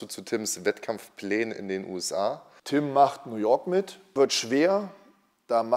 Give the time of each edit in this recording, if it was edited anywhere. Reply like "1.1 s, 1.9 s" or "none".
2.5 s, 4.0 s

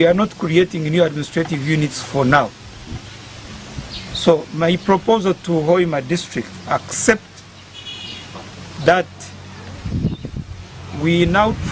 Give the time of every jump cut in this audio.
none

